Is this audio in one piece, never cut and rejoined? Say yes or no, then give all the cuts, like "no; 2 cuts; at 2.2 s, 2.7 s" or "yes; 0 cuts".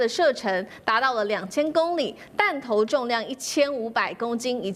yes; 0 cuts